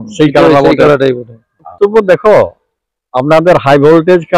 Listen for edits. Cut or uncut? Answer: cut